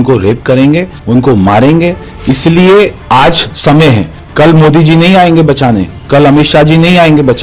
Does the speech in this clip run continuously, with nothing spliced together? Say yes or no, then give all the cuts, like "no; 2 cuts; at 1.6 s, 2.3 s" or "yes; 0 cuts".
no; 3 cuts; at 0.9 s, 2.1 s, 4.2 s